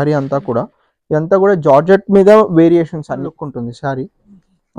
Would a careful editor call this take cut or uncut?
cut